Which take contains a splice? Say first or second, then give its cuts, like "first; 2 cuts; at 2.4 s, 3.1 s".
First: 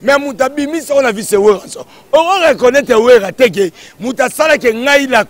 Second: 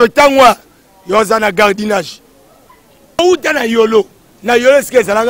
second; 1 cut; at 3.2 s